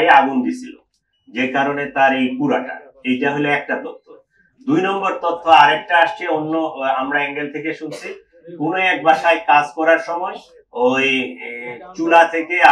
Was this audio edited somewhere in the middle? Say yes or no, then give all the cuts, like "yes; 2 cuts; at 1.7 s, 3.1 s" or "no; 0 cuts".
no; 0 cuts